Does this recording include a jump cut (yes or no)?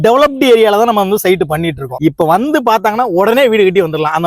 yes